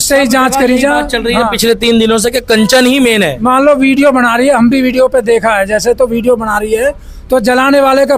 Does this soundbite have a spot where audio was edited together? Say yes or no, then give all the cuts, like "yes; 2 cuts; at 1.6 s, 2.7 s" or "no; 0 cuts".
no; 0 cuts